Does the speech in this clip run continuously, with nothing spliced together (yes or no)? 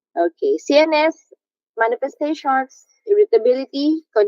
no